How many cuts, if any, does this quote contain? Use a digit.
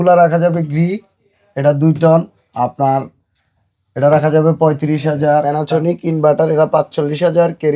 1